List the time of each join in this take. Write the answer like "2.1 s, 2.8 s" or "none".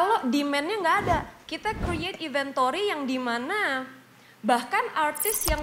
1.4 s